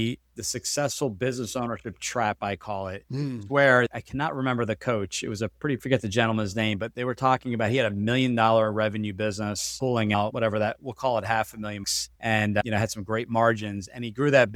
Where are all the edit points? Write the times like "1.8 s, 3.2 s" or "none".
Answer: none